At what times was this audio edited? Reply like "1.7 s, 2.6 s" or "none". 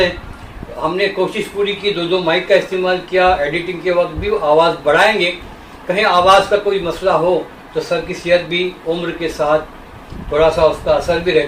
none